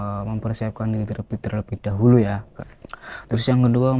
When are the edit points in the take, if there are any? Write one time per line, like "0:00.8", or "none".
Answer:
0:02.5